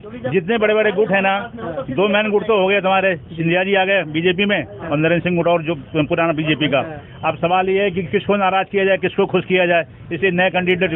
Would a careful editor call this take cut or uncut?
uncut